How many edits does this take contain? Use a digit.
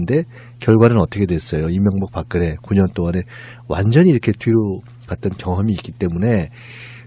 0